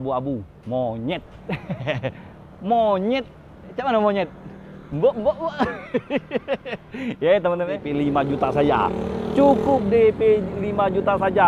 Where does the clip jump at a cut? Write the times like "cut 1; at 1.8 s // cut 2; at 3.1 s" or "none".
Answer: cut 1; at 7.8 s